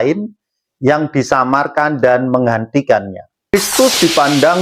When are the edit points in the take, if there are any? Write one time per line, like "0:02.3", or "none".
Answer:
0:03.5